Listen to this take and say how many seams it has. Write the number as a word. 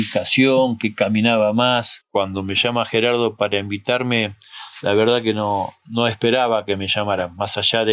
one